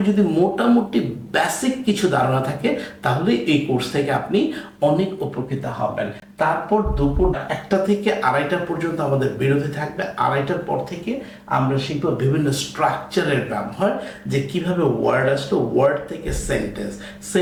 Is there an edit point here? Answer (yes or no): no